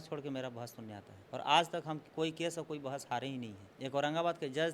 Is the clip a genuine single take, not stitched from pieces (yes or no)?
no